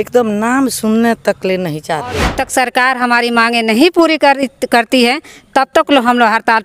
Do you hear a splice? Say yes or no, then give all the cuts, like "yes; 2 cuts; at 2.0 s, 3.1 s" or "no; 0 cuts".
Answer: yes; 1 cut; at 2.3 s